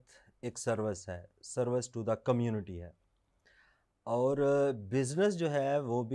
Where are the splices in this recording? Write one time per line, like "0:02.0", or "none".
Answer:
none